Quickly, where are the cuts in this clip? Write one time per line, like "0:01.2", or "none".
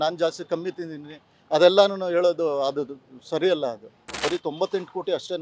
0:04.2